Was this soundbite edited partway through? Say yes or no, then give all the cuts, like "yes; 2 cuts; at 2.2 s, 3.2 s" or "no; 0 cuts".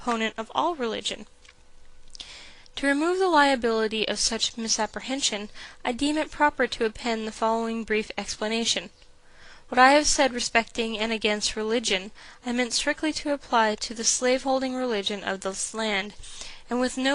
yes; 1 cut; at 10.2 s